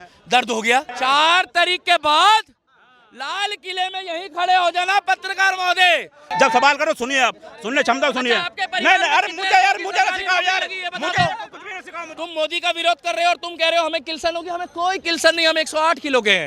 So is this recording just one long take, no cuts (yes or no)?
no